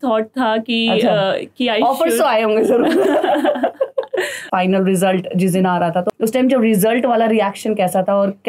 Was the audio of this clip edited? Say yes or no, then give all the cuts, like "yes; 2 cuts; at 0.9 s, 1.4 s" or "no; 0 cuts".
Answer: yes; 2 cuts; at 4.5 s, 6.1 s